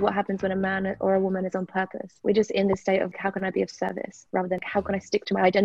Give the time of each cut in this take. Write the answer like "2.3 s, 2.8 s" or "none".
2.0 s, 3.1 s, 4.6 s